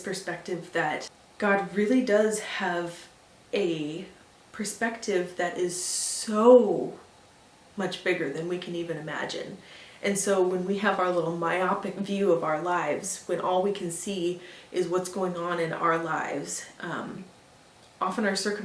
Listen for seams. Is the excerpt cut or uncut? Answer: cut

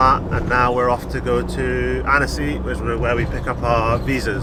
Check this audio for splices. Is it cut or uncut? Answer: uncut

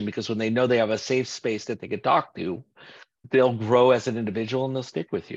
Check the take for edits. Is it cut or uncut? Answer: cut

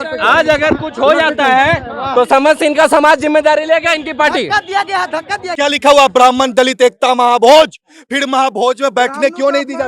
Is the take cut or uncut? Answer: cut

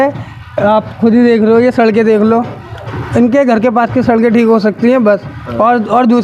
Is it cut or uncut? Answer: uncut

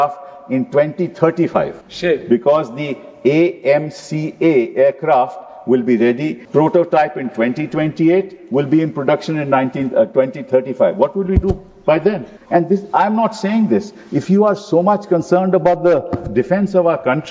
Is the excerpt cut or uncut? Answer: cut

